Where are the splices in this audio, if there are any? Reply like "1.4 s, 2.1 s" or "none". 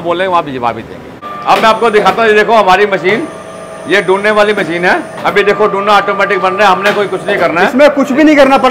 none